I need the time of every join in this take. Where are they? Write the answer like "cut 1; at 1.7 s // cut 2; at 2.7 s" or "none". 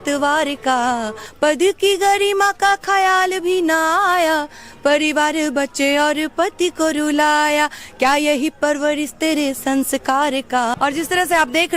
cut 1; at 1.2 s // cut 2; at 10.7 s